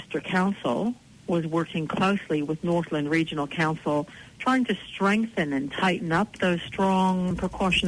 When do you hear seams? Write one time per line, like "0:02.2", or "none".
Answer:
0:01.1